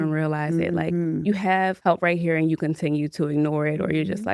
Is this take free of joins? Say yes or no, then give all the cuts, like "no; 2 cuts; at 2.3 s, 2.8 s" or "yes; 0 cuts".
no; 1 cut; at 1.8 s